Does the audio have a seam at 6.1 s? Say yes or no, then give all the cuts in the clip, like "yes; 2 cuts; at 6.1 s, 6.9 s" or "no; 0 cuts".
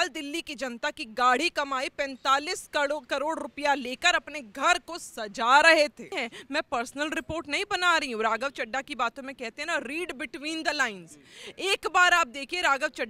yes; 1 cut; at 6.1 s